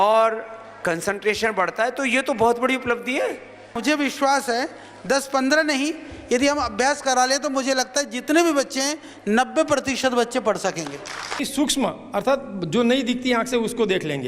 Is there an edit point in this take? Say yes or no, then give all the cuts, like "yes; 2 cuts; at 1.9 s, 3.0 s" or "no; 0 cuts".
yes; 2 cuts; at 3.8 s, 11.4 s